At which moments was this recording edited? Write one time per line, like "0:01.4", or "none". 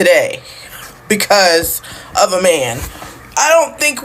none